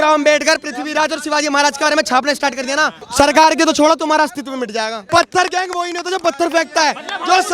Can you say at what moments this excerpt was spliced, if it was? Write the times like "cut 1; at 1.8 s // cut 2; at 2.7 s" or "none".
cut 1; at 3.0 s // cut 2; at 5.0 s